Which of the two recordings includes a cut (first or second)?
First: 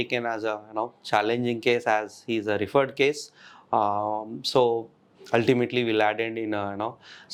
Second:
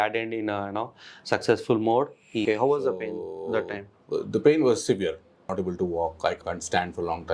second